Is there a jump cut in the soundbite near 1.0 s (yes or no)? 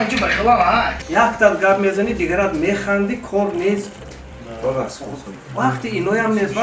yes